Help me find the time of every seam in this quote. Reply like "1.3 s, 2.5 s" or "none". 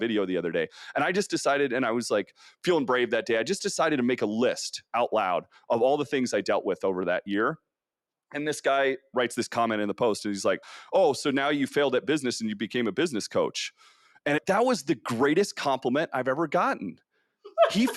none